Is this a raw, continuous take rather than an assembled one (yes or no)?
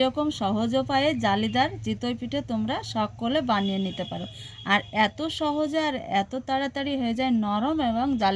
yes